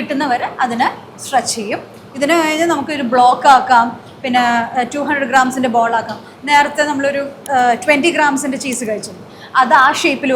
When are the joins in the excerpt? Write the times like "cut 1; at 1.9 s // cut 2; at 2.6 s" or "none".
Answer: none

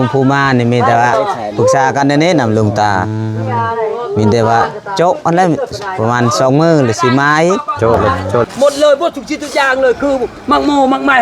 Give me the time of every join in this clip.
cut 1; at 8.5 s

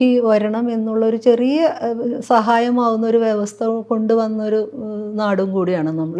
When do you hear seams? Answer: none

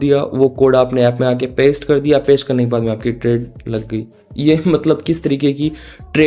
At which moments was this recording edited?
none

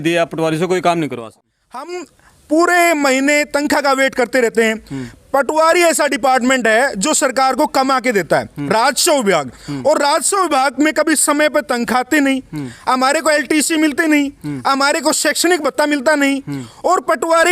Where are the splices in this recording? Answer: cut 1; at 1.3 s

